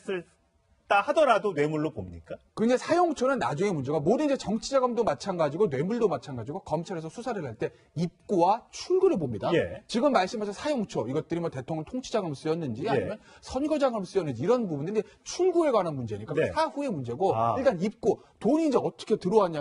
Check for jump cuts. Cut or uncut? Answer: cut